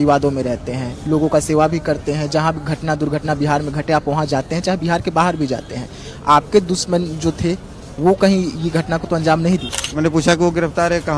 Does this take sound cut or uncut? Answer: cut